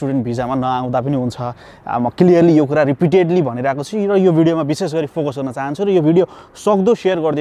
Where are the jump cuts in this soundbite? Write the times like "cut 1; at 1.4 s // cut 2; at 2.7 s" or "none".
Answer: none